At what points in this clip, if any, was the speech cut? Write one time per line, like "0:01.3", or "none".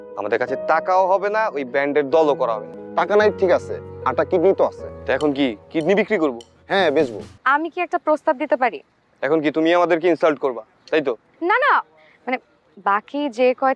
0:02.7
0:07.4